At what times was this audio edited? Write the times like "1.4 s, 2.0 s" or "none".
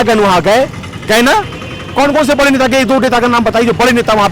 none